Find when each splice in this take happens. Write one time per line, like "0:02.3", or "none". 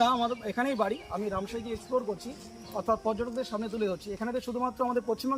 none